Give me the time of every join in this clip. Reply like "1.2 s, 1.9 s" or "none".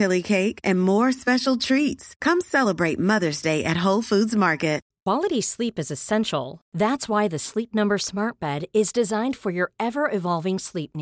4.9 s